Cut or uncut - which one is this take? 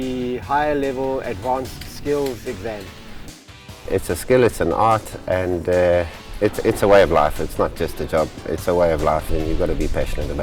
cut